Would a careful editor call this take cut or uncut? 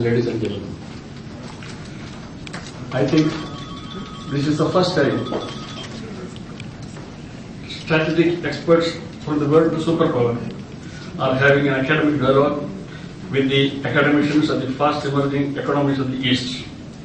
cut